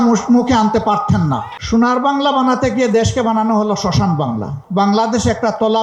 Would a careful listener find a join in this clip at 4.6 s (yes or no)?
yes